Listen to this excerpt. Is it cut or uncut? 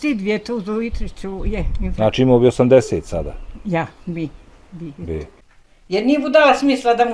cut